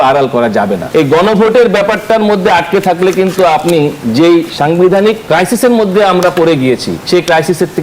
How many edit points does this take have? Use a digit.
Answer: 4